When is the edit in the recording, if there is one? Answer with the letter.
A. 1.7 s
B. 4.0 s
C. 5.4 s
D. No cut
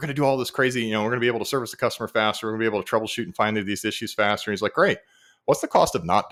D